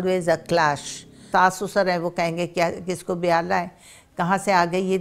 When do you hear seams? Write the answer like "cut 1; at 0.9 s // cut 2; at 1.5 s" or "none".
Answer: cut 1; at 1.2 s